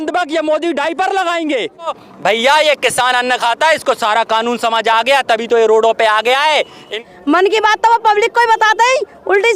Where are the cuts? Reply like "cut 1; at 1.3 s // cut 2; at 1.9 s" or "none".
cut 1; at 2.1 s // cut 2; at 6.9 s